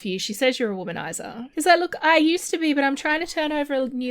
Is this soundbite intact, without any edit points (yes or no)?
no